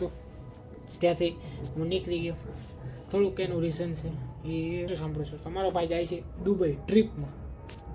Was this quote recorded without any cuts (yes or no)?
no